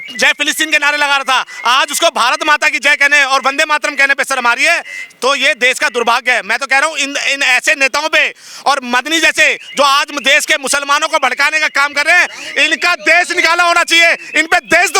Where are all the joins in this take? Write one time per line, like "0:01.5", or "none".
none